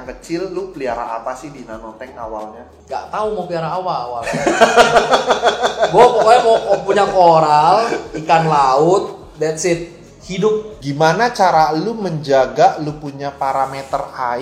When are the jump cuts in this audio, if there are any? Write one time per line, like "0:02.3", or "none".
0:10.7